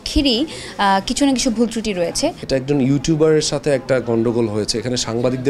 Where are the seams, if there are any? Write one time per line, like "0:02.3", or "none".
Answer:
0:02.4